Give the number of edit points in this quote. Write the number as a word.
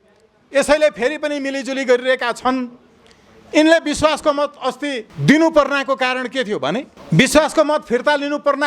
two